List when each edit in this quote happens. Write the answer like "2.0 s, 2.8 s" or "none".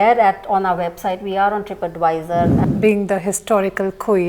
2.6 s